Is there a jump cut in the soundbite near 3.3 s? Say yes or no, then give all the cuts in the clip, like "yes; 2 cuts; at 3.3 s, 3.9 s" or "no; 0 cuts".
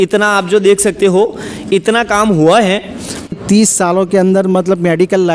yes; 1 cut; at 3.3 s